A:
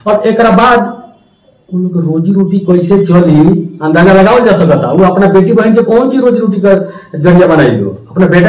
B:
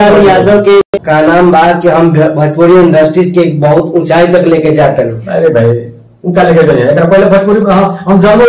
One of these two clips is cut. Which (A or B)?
B